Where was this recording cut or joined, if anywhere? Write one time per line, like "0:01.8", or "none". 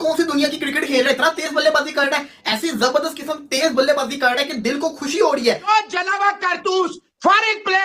0:05.7